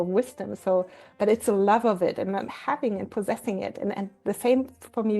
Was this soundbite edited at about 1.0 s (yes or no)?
yes